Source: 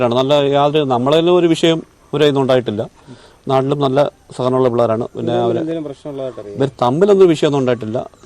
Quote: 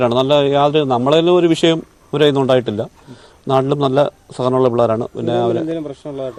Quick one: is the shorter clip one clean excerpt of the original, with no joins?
yes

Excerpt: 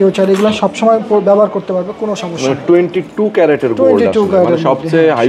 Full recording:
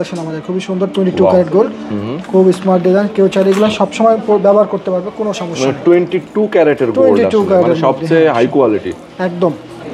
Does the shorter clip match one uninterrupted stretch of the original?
yes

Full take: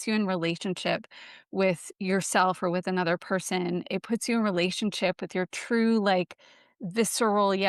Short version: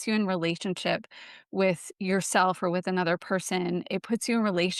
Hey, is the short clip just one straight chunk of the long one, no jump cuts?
yes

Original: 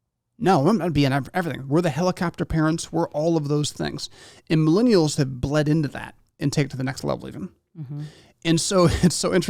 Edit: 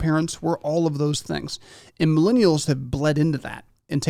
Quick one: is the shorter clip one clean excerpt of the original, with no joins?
yes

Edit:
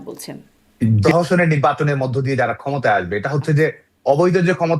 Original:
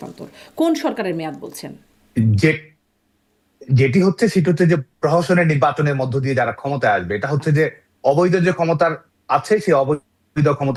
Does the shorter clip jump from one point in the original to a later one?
yes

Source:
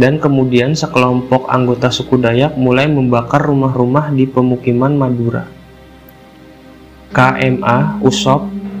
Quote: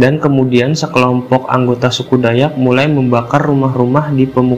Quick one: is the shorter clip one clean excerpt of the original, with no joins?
yes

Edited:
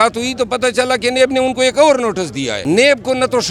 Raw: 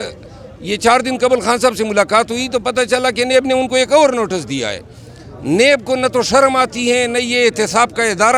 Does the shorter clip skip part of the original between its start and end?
yes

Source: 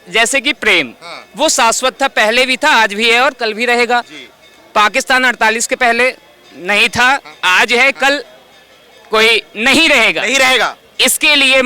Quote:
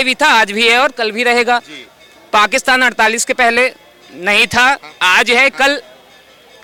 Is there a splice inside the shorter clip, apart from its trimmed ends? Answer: no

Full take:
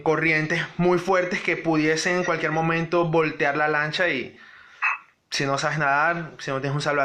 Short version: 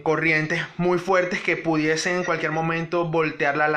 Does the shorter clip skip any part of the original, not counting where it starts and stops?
no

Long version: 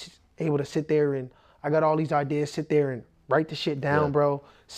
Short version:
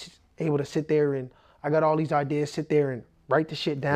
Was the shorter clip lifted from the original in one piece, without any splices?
yes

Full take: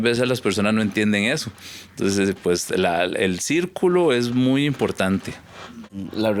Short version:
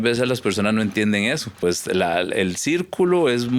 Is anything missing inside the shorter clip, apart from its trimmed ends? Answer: yes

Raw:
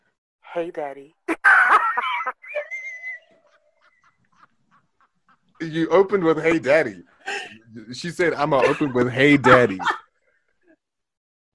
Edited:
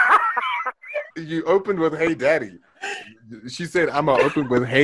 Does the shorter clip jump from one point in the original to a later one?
yes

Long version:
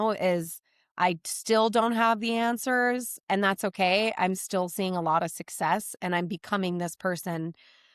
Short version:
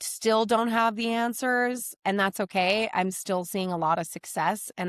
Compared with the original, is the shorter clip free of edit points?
yes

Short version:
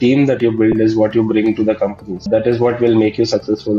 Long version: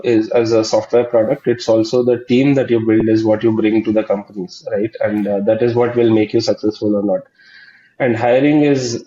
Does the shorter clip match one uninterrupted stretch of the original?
no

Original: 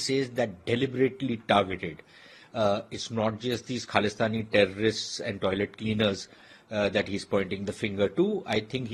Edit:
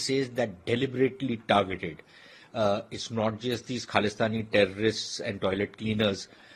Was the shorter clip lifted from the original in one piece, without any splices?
yes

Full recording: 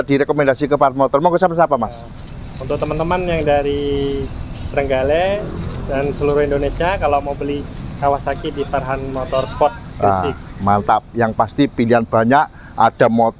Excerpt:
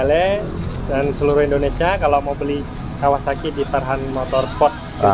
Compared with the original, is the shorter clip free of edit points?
yes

